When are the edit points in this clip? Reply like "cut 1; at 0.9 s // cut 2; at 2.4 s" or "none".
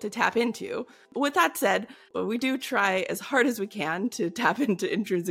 cut 1; at 1.0 s // cut 2; at 2.1 s